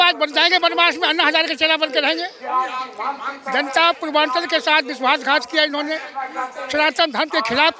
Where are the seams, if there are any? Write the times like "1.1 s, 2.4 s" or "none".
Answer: none